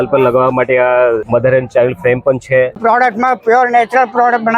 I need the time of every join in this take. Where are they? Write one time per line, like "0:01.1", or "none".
0:01.2
0:02.8